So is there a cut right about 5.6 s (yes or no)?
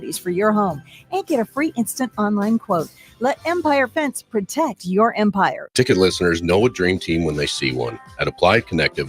yes